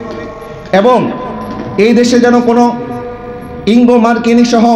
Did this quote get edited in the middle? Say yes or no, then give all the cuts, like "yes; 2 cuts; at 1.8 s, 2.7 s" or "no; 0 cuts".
no; 0 cuts